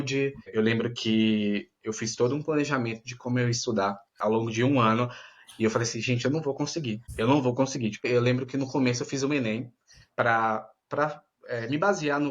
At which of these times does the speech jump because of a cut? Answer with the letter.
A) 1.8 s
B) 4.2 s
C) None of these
B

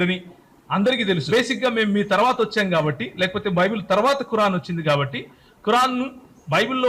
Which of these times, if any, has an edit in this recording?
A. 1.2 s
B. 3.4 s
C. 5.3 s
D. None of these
A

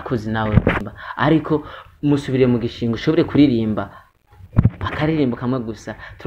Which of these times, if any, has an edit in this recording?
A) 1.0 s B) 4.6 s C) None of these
A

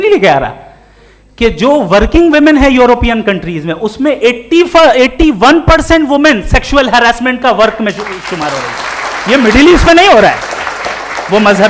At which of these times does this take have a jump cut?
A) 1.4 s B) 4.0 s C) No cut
C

